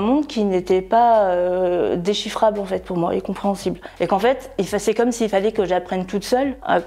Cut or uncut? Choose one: uncut